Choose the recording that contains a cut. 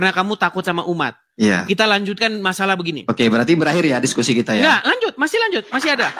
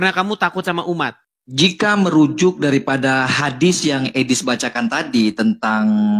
second; 1 cut; at 1.2 s

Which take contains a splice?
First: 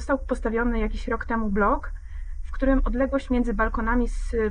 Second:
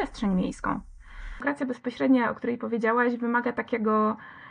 second; 1 cut; at 1.4 s

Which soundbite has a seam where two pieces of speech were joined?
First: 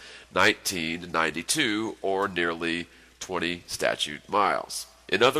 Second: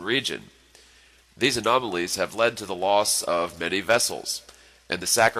first; 1 cut; at 2.0 s

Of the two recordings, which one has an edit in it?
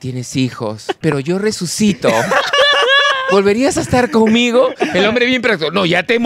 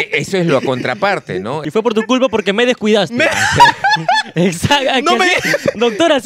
second; 1 cut; at 1.7 s

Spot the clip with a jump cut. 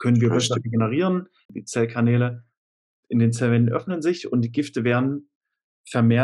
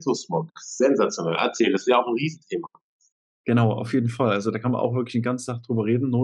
first; 1 cut; at 1.5 s

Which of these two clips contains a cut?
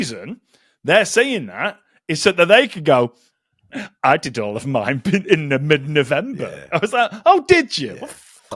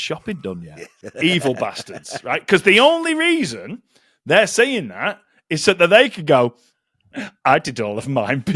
second; 1 cut; at 1.0 s

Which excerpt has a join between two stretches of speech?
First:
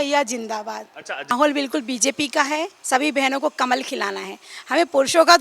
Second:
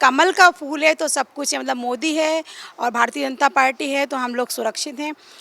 first; 1 cut; at 1.3 s

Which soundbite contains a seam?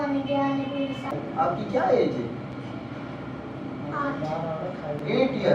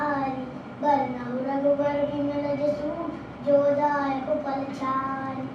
first; 1 cut; at 1.1 s

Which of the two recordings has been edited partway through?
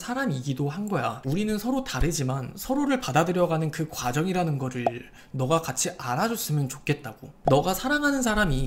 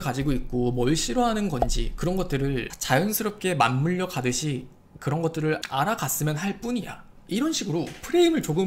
first; 2 cuts; at 1.1 s, 7.2 s

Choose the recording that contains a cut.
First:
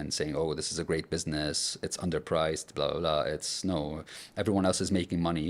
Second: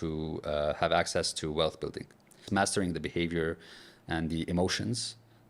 second; 1 cut; at 2.4 s

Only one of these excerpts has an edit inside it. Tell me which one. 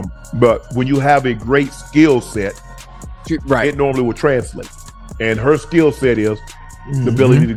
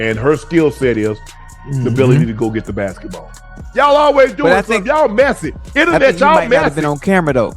second; 1 cut; at 3.3 s

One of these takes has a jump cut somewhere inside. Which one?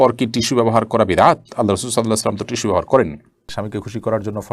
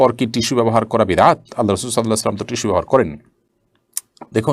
first; 1 cut; at 3.5 s

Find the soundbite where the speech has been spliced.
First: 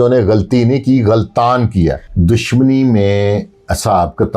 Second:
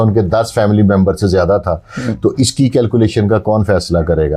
first; 1 cut; at 2.1 s

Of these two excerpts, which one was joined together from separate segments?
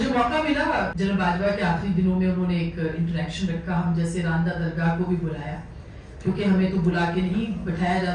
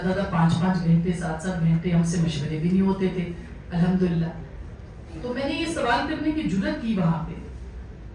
first; 1 cut; at 0.9 s

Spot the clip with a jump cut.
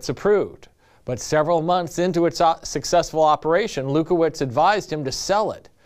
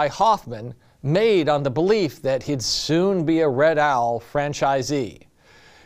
first; 1 cut; at 3.9 s

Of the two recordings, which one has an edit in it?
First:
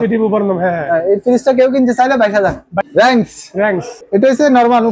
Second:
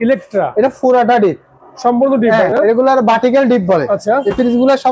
first; 2 cuts; at 2.7 s, 3.9 s

